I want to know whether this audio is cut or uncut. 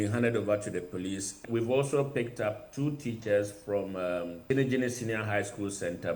cut